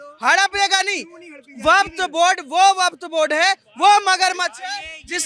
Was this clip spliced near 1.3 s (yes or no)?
no